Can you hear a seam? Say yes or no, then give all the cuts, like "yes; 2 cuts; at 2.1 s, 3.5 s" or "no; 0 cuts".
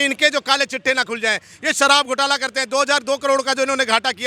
no; 0 cuts